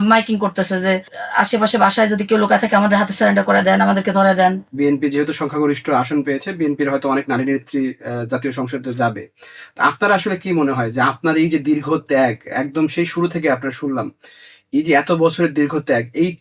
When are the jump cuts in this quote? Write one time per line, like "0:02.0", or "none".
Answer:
0:04.6

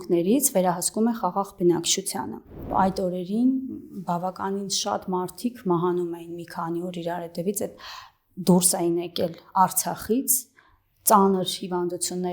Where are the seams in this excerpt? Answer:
0:02.7

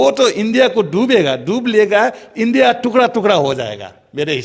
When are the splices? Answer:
none

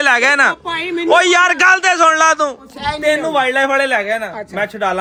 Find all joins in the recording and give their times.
none

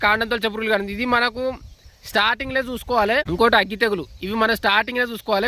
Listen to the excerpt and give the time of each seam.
0:03.3

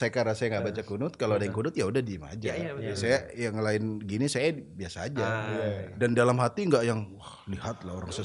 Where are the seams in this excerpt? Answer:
none

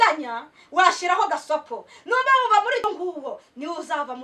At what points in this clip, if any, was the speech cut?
0:02.8

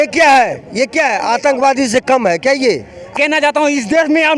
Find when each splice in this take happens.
0:03.1

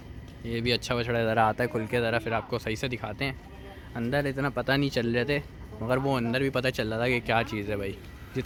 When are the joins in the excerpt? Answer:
none

